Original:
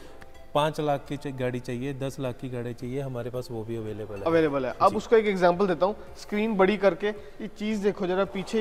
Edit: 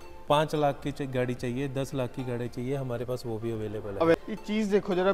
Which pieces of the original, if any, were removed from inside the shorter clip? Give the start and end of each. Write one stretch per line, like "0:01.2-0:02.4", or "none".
0:04.4-0:07.3